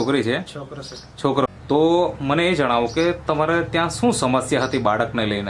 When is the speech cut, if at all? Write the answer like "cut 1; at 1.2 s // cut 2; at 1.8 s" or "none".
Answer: cut 1; at 1.5 s